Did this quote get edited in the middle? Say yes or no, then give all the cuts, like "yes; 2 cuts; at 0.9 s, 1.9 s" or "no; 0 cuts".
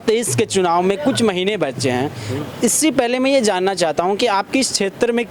no; 0 cuts